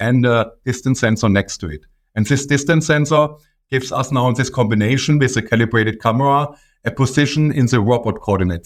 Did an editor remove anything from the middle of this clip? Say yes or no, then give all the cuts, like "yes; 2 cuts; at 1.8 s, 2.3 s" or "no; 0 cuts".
no; 0 cuts